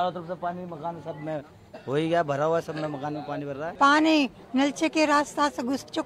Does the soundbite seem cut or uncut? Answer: cut